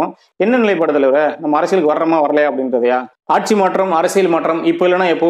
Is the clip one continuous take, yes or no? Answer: no